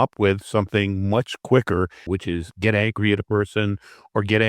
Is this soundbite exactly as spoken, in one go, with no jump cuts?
no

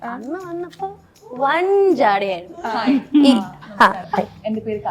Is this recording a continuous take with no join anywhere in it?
yes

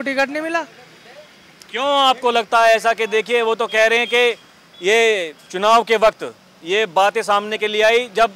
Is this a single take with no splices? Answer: yes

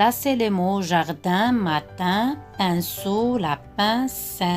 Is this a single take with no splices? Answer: yes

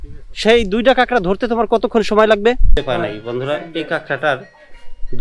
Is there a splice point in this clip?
yes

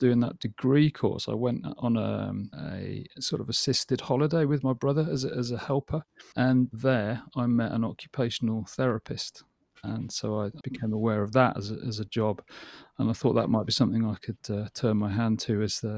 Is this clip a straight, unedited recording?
no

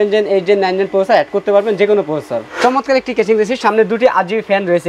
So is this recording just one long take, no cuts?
no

